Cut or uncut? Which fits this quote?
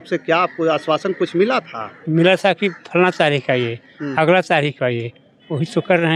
uncut